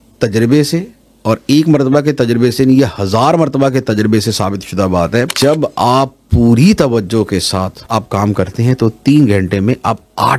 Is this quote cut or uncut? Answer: cut